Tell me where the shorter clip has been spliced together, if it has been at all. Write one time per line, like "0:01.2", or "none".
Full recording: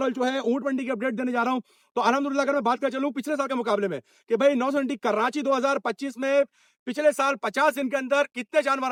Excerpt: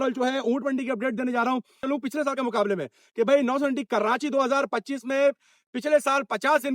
0:01.8